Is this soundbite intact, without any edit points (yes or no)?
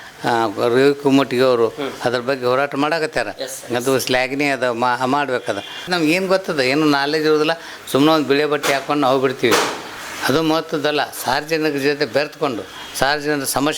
no